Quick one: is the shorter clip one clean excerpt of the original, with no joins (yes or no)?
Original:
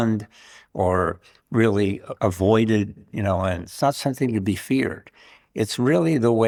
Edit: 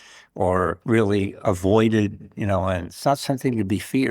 no